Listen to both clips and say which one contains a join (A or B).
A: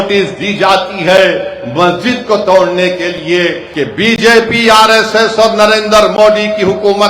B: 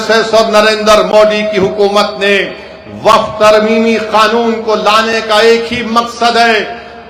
A